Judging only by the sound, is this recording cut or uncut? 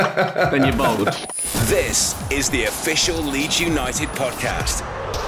cut